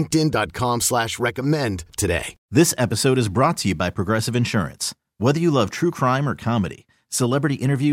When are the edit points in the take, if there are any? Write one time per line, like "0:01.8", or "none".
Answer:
0:02.4